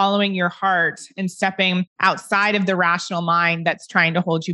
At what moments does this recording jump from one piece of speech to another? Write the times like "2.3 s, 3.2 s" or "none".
1.9 s